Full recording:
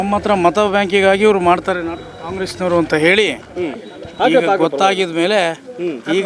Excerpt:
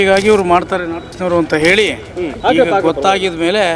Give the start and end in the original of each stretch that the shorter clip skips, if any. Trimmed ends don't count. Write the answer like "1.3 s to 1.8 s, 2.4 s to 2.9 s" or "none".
2.1 s to 2.5 s, 3.6 s to 4.0 s